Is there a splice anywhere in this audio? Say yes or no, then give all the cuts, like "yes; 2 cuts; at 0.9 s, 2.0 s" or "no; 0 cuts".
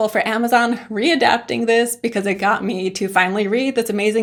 no; 0 cuts